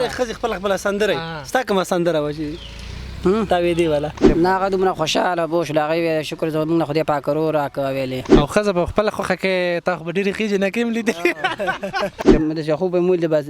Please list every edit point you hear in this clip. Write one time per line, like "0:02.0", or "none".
0:04.2
0:08.3
0:12.3